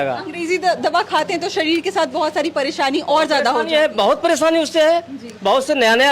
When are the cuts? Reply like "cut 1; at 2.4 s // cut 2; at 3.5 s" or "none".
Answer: none